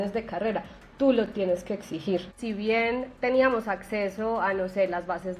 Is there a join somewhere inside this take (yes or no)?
yes